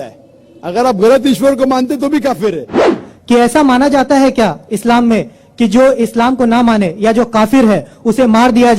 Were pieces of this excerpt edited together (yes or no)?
yes